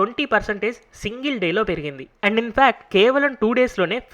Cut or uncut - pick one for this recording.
cut